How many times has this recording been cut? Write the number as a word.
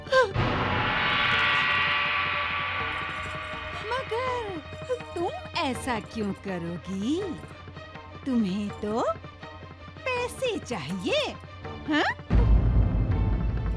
zero